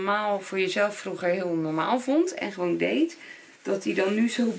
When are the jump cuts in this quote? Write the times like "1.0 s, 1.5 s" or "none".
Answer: none